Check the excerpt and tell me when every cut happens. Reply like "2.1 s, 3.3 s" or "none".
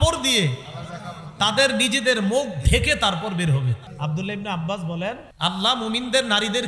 3.8 s, 5.3 s